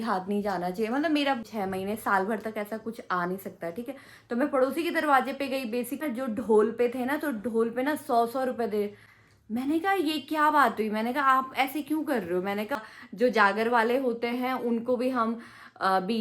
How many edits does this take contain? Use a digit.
4